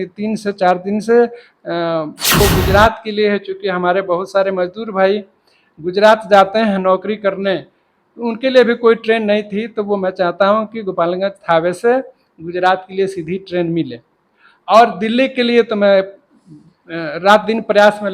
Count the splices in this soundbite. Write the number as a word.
one